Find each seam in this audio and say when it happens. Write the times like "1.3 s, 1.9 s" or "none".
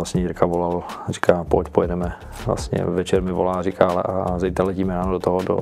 none